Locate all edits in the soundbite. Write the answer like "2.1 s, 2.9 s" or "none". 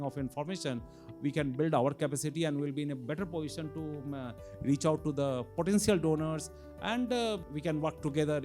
7.4 s